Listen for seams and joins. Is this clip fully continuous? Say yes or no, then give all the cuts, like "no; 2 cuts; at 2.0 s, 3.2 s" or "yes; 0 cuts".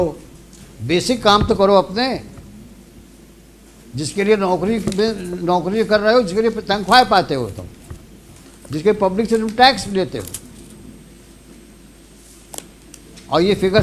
yes; 0 cuts